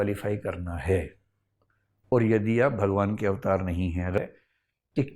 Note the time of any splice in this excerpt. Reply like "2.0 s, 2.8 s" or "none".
4.2 s